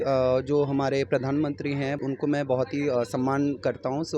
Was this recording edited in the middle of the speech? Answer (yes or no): yes